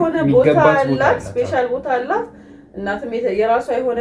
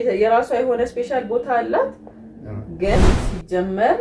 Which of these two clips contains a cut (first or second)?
second